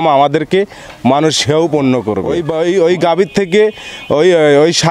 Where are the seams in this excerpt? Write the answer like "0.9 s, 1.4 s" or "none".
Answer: 2.3 s